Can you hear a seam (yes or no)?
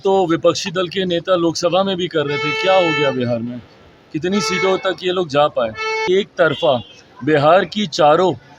yes